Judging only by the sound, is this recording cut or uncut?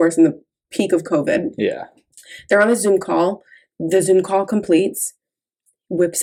uncut